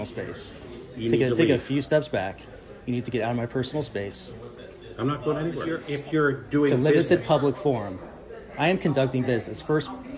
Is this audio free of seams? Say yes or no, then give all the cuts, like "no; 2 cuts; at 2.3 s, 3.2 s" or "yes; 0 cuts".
no; 1 cut; at 5.9 s